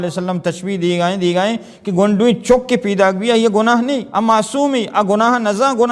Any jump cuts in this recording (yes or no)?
yes